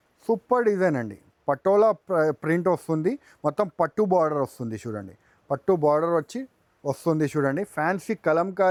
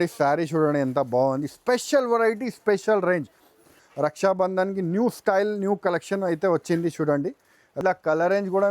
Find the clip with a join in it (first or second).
second